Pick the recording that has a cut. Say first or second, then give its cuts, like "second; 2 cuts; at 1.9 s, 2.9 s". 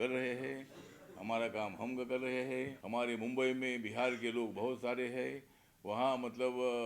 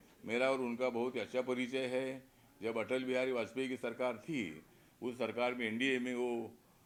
first; 1 cut; at 2.8 s